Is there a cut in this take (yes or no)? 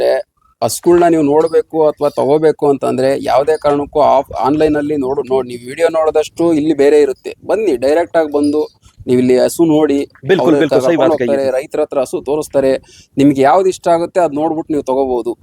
no